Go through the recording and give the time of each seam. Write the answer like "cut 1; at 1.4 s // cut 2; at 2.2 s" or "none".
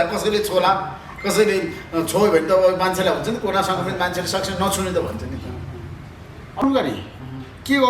cut 1; at 6.6 s

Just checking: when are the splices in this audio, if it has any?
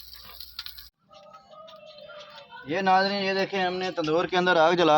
cut 1; at 1.0 s

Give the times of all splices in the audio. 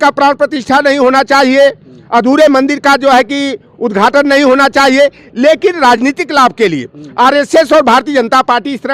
none

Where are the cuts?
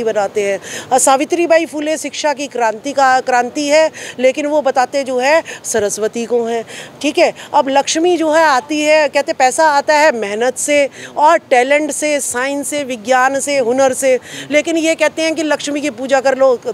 none

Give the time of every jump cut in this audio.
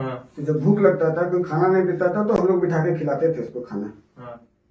none

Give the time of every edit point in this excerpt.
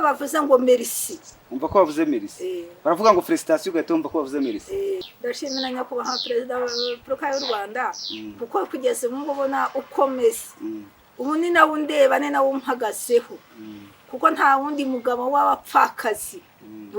cut 1; at 5.1 s

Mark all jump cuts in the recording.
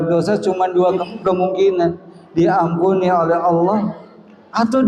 cut 1; at 1.0 s

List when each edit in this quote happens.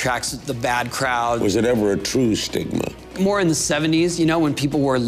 cut 1; at 1.4 s // cut 2; at 3.1 s

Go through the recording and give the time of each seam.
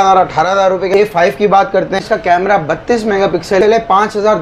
cut 1; at 0.9 s // cut 2; at 2.0 s // cut 3; at 3.6 s

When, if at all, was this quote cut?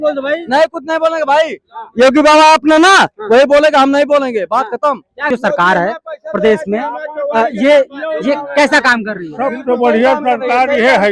cut 1; at 5.3 s

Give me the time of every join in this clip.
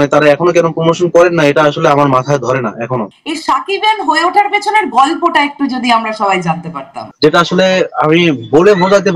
cut 1; at 3.1 s // cut 2; at 7.1 s

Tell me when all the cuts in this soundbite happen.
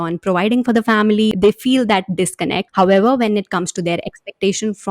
cut 1; at 1.3 s // cut 2; at 2.6 s

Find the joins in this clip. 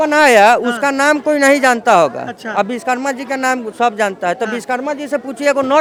none

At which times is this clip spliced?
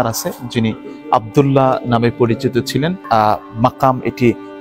cut 1; at 3.0 s

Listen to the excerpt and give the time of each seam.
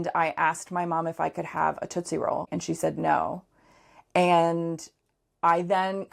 cut 1; at 2.5 s

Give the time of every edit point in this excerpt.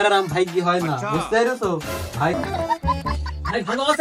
cut 1; at 2.3 s

